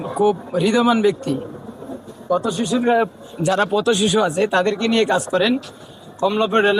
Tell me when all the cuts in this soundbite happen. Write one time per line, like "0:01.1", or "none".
none